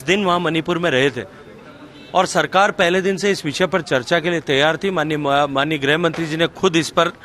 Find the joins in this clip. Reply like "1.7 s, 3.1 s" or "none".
none